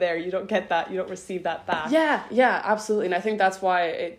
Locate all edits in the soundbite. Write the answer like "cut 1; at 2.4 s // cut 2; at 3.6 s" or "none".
cut 1; at 1.8 s